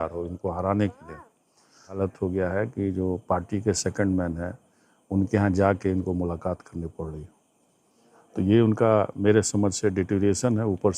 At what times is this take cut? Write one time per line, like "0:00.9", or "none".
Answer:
0:02.0